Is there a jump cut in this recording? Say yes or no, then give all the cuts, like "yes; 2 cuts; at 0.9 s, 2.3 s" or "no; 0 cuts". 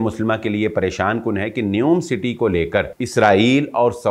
yes; 1 cut; at 3.0 s